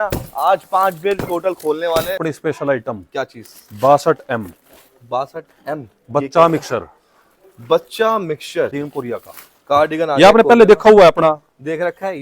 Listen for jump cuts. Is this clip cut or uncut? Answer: cut